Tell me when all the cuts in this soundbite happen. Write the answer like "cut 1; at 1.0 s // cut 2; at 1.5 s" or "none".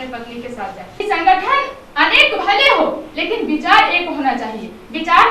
cut 1; at 1.0 s